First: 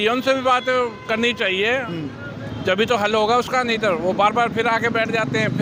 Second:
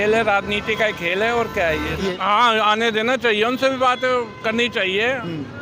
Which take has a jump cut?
second; 1 cut; at 2.0 s

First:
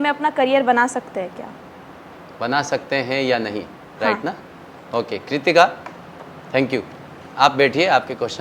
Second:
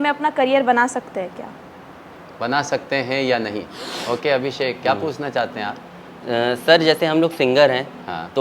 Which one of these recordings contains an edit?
second; 1 cut; at 3.9 s

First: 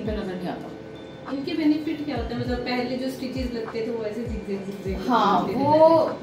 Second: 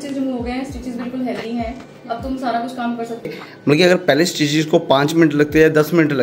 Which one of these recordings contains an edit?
second; 1 cut; at 3.4 s

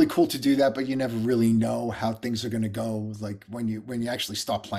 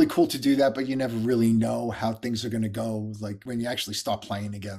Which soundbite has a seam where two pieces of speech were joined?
second; 1 cut; at 3.4 s

